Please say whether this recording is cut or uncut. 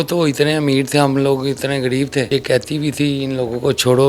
cut